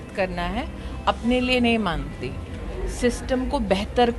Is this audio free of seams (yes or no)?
yes